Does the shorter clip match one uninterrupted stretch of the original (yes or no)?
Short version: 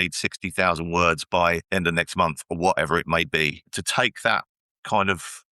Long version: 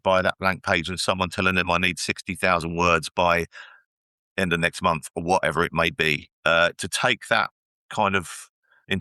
no